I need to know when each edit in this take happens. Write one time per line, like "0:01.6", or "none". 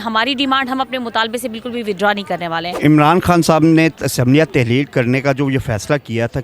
0:02.7